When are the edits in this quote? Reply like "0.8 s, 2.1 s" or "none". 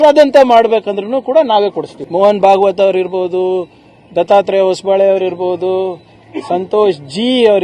1.9 s

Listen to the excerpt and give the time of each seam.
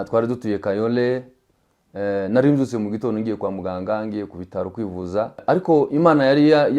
5.4 s

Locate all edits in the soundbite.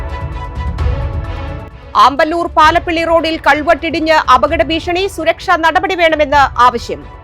1.4 s

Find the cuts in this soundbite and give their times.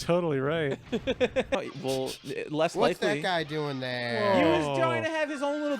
1.6 s

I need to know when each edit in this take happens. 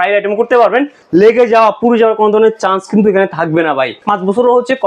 1.0 s, 4.0 s

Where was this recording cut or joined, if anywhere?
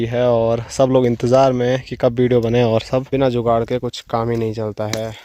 3.1 s

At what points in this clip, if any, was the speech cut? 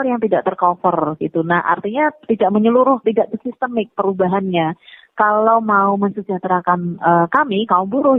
none

